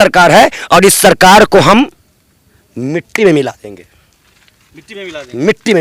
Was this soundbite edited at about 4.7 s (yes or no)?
no